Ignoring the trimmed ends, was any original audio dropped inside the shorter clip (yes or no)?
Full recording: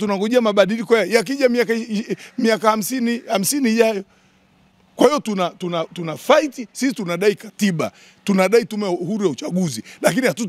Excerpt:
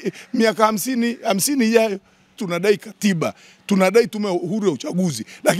yes